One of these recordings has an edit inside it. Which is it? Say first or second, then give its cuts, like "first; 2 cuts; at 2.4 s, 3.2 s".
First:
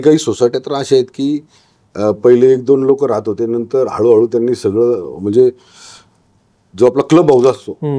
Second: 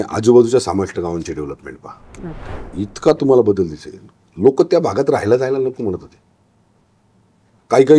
second; 1 cut; at 2.5 s